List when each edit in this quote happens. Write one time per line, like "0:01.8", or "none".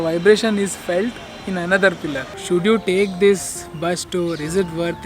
0:02.3